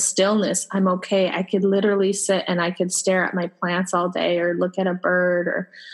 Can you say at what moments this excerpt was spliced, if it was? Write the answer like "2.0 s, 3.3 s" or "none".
none